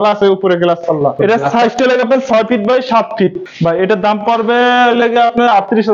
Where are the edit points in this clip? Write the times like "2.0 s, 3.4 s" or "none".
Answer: 1.2 s, 3.5 s